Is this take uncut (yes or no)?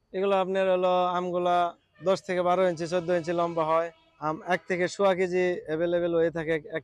no